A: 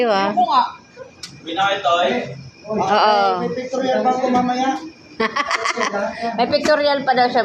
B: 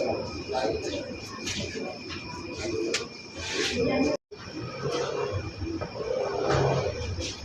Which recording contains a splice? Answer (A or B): B